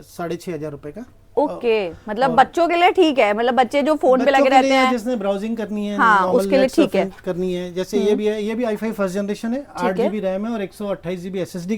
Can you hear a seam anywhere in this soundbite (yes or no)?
no